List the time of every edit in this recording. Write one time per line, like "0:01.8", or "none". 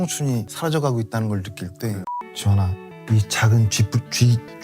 0:02.2

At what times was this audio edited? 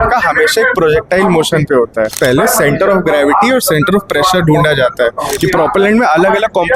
0:02.1
0:05.4

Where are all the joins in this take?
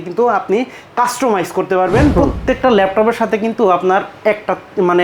0:02.1

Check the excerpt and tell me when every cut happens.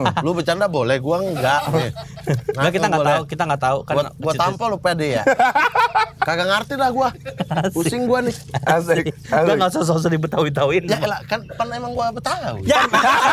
none

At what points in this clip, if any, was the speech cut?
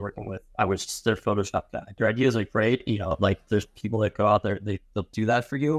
0:01.9

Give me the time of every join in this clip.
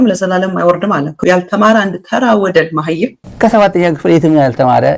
0:01.2
0:03.2

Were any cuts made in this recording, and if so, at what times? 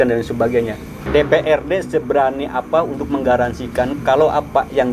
0:01.0

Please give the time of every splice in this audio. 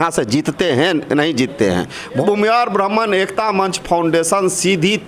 0:02.2

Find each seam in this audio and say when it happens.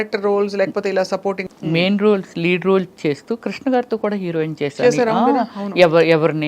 0:01.4

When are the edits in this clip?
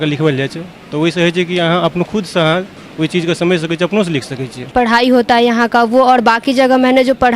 0:04.7

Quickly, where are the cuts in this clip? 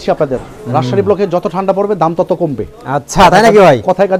none

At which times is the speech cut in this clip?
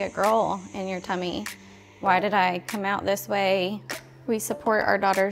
0:04.1

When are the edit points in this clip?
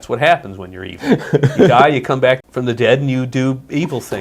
0:02.4

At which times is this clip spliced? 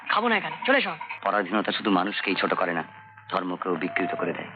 0:01.0

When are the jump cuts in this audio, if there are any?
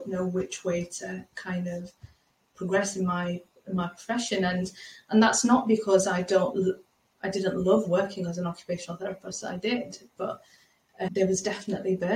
0:11.1

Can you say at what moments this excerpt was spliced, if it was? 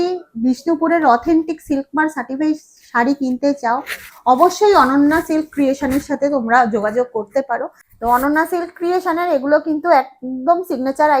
0:07.7

